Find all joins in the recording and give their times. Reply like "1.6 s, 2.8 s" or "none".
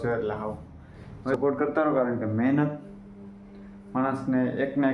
1.3 s